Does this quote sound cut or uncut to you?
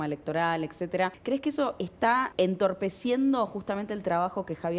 cut